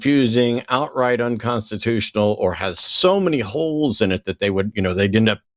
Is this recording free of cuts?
yes; 0 cuts

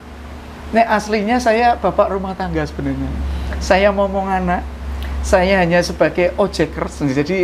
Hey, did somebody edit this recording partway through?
no; 0 cuts

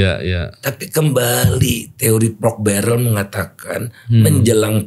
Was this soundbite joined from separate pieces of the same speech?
no; 0 cuts

